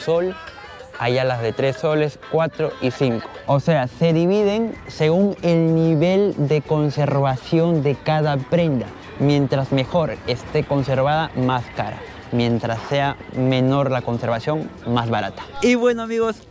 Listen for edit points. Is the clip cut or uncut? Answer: uncut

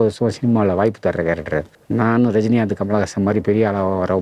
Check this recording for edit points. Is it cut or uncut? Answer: cut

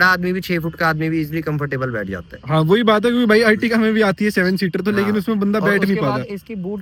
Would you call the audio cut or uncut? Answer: uncut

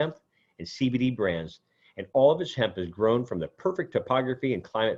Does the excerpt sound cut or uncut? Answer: uncut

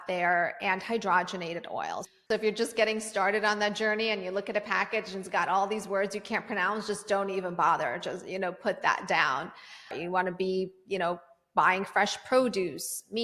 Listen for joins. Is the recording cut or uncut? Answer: cut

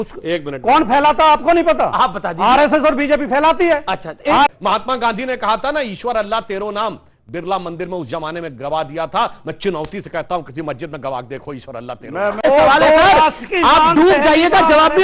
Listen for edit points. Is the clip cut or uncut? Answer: cut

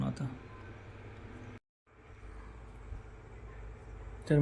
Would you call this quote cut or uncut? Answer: cut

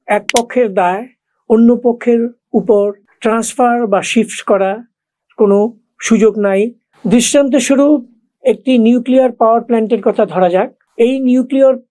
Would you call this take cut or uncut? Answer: uncut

